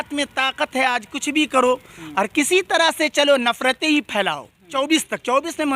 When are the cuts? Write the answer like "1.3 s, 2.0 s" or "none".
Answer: 4.6 s